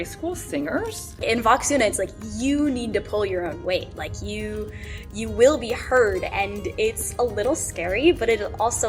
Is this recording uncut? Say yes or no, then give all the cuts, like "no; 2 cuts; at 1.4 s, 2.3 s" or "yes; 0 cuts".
no; 1 cut; at 1.1 s